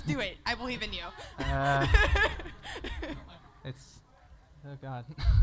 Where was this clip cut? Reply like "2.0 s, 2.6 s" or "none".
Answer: 3.2 s